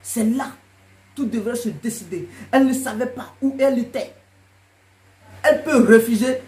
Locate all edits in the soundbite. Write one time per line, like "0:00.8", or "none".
0:05.3